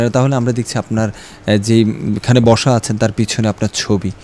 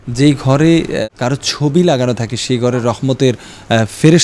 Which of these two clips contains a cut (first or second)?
second